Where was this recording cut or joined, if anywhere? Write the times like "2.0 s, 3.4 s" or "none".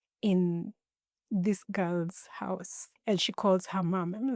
none